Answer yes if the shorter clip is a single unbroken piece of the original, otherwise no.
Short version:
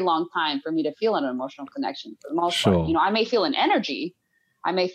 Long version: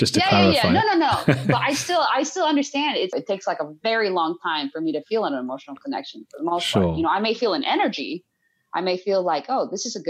yes